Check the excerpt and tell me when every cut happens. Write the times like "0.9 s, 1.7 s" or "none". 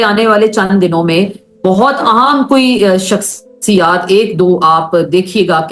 none

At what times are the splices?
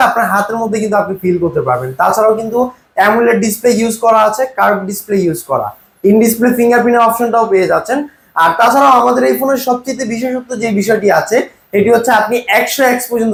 none

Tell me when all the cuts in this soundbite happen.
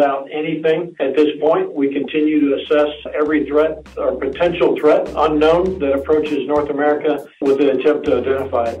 1.0 s, 3.0 s, 7.4 s

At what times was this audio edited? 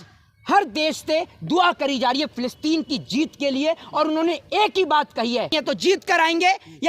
5.5 s

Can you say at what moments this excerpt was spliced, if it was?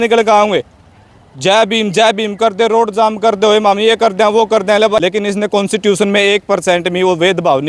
5.0 s

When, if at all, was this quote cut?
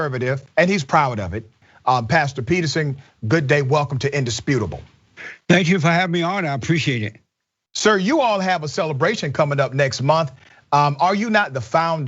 1.7 s

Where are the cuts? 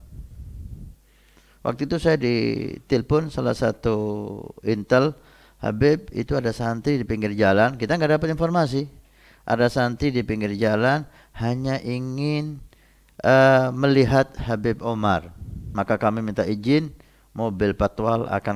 15.7 s

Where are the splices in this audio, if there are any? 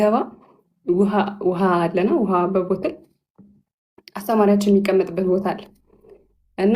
none

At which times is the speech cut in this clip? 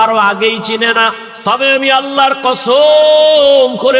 1.3 s

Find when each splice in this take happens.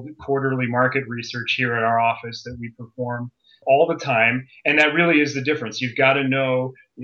3.6 s

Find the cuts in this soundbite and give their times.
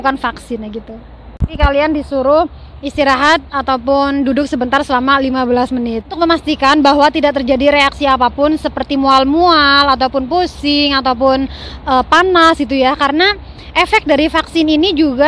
1.5 s, 6.1 s

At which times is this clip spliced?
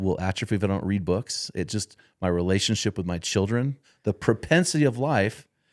3.9 s

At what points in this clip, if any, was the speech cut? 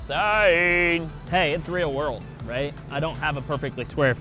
1.2 s

